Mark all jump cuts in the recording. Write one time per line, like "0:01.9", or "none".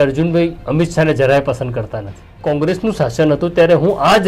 0:02.4